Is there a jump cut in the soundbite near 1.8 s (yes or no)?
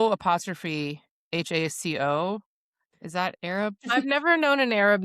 no